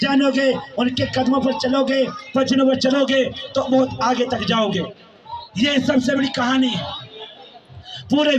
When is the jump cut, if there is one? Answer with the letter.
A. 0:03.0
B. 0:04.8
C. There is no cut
C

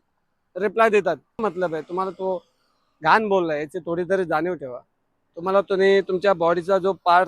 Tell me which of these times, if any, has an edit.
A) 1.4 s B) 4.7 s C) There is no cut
A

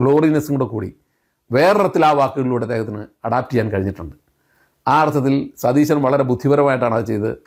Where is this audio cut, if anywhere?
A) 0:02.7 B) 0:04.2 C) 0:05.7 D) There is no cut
D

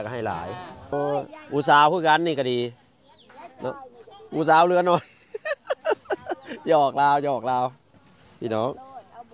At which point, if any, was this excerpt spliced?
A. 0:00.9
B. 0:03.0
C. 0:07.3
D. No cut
A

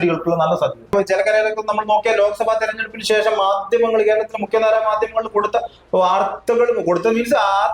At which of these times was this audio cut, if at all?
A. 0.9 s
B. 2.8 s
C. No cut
A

